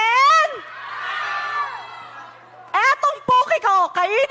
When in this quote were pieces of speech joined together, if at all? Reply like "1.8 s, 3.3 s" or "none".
none

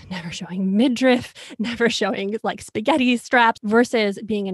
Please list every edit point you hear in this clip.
3.6 s

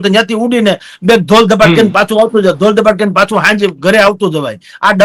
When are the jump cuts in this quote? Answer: none

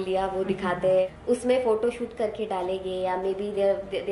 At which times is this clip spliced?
1.1 s

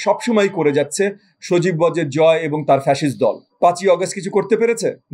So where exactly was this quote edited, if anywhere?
3.4 s

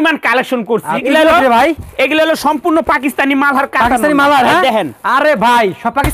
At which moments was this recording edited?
1.0 s

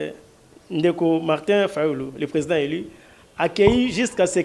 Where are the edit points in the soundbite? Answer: none

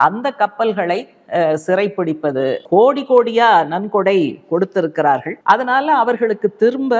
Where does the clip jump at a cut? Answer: 2.6 s

